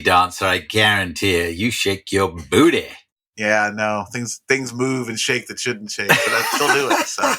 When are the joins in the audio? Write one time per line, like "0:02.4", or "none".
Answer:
none